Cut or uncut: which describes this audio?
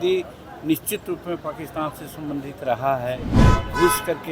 cut